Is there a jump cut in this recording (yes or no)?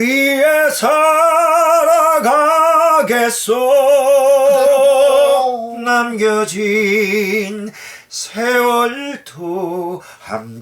no